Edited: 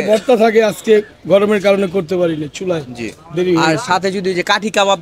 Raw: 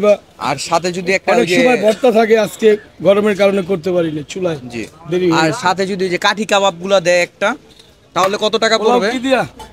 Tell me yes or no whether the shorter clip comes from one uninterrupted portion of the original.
yes